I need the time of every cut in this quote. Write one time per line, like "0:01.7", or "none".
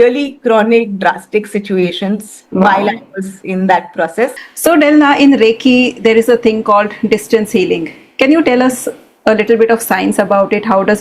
0:04.5